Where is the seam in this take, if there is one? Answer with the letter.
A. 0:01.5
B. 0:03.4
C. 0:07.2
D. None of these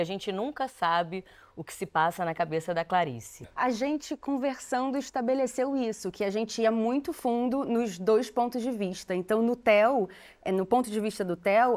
B